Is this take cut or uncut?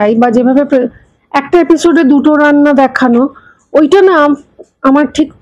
uncut